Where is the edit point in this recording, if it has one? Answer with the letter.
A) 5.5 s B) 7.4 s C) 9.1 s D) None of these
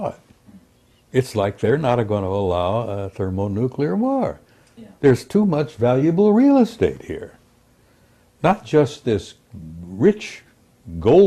D